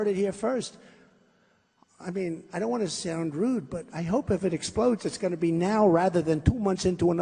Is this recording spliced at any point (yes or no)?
no